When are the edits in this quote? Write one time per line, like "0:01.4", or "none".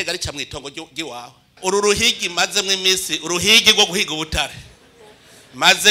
0:01.6